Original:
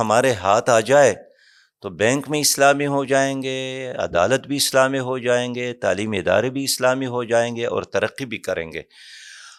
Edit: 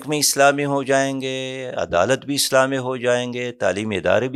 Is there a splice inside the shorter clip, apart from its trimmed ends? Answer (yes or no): no